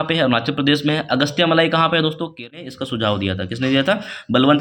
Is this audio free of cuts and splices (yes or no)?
no